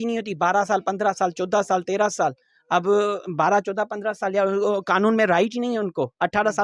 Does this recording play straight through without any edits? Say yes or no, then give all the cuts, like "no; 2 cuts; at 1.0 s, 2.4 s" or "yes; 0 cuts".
yes; 0 cuts